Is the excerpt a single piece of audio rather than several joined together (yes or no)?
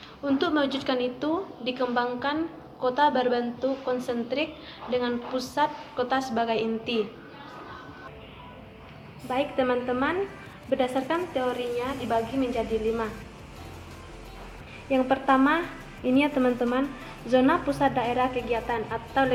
yes